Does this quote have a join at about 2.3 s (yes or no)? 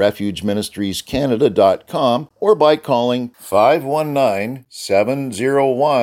yes